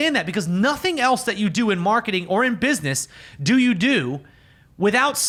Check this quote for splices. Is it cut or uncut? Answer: uncut